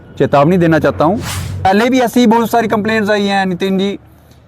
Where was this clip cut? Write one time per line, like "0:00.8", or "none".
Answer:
0:01.6

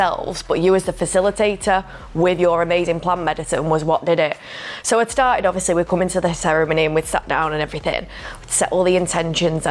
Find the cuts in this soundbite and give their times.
none

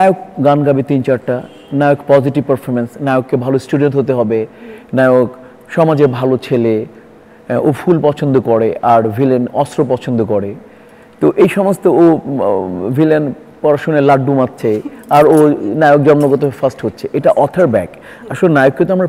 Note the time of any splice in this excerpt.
none

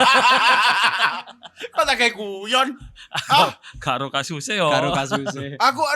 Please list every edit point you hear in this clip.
none

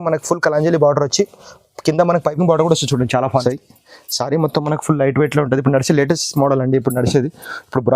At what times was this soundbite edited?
0:03.3

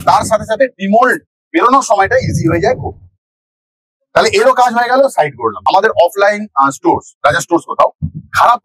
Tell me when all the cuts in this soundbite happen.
0:05.6

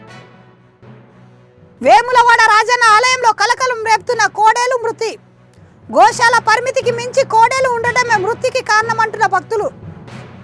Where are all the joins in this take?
none

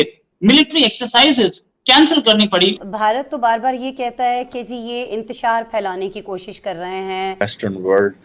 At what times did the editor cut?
0:02.8
0:07.4

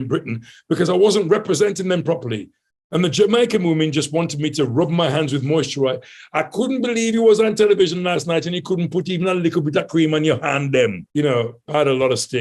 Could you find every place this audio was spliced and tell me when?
0:11.0

